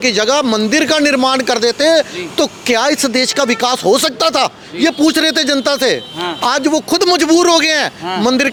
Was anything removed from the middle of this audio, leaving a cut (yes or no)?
no